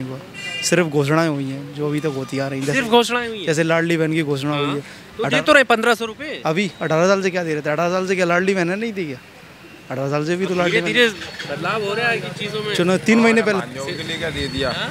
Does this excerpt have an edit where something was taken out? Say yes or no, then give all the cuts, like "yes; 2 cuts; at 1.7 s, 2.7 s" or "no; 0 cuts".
no; 0 cuts